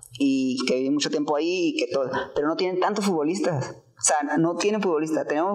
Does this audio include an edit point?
no; 0 cuts

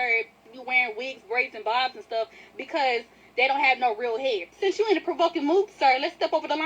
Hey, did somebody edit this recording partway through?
yes; 1 cut; at 3.2 s

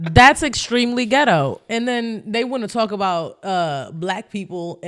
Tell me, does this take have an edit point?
no; 0 cuts

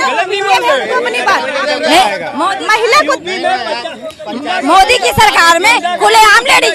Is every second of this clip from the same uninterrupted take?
yes; 0 cuts

